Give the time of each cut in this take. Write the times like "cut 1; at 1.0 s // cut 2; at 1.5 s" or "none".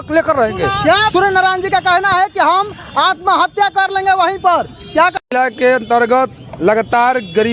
cut 1; at 1.1 s // cut 2; at 5.2 s